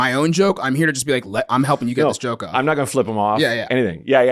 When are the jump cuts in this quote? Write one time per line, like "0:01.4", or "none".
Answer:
none